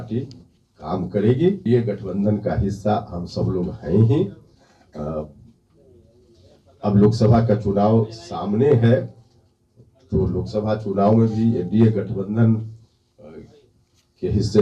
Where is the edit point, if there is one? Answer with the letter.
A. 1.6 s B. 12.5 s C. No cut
A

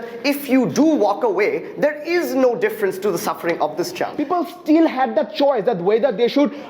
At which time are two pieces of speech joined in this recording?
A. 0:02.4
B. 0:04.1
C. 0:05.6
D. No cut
B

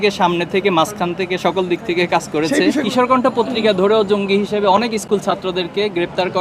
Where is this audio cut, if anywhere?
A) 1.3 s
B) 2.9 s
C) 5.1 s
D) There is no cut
B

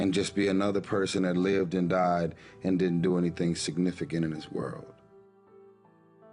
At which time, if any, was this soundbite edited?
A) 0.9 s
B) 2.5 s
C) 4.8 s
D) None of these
C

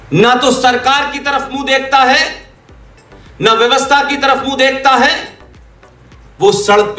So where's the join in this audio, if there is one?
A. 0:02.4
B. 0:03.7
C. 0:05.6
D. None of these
D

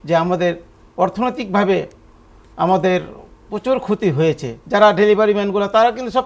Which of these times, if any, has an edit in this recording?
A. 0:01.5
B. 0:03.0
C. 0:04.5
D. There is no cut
C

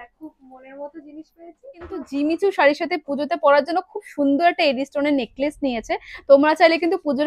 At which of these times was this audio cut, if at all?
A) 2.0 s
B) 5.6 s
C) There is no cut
A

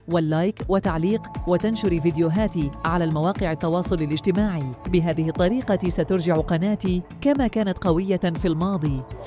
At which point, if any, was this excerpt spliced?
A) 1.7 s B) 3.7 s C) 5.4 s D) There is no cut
D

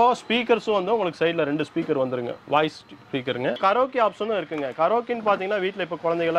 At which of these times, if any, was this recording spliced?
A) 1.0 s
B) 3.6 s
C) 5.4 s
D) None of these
B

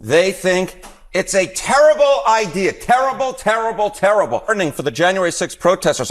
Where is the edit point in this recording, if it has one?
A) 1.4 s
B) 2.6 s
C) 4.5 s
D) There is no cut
C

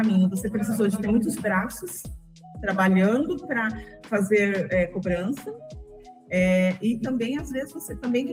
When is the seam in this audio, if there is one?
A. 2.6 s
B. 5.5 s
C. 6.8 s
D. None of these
D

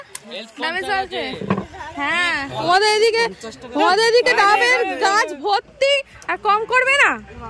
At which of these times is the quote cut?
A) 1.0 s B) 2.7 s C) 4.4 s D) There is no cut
B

